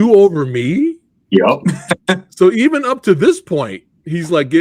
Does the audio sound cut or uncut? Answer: uncut